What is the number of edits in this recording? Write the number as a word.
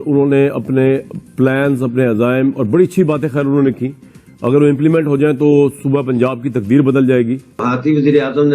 one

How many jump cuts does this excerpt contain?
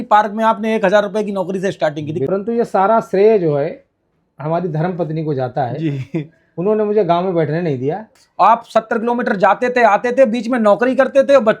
two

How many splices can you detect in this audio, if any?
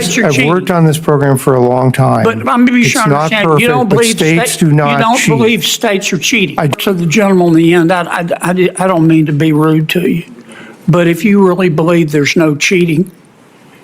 one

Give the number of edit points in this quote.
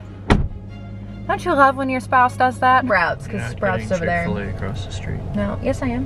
one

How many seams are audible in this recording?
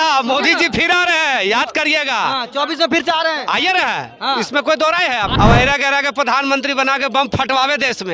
one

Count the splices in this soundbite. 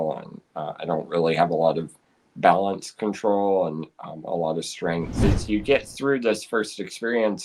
one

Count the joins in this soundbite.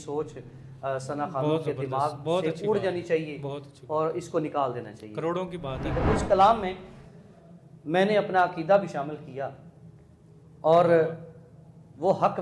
one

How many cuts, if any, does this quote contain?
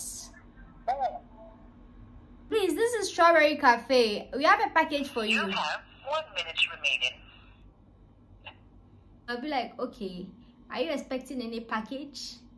two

